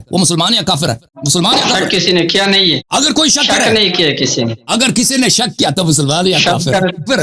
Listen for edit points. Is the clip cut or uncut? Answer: cut